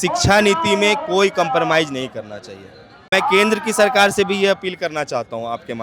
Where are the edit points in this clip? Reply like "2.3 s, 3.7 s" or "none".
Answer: 3.1 s